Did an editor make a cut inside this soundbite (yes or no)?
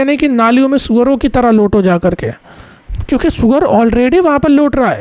no